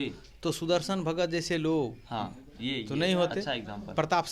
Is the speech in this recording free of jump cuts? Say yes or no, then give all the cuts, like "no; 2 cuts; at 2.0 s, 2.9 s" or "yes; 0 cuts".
yes; 0 cuts